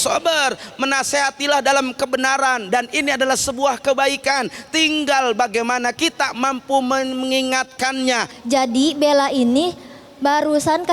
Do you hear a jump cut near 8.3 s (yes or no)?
yes